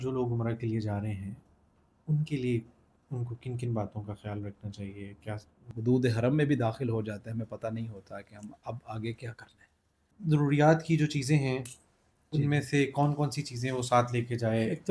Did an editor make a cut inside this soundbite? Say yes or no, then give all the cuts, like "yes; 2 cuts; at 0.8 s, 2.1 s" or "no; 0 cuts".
yes; 2 cuts; at 5.7 s, 10.1 s